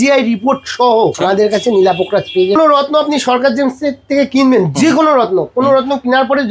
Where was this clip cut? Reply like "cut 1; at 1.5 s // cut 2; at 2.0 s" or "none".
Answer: cut 1; at 1.2 s // cut 2; at 2.5 s